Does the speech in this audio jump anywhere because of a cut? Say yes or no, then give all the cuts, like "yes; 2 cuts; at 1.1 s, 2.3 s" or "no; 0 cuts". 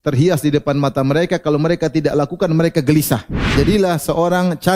yes; 1 cut; at 3.4 s